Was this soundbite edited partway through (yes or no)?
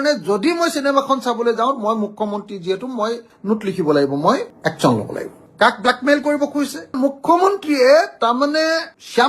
yes